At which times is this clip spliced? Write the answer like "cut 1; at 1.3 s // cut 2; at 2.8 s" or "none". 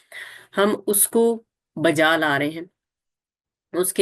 none